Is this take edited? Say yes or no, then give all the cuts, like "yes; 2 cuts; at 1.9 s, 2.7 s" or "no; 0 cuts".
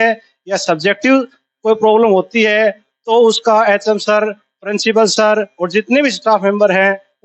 no; 0 cuts